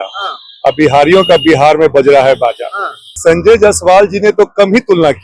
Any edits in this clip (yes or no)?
yes